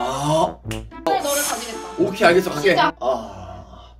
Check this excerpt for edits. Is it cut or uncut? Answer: uncut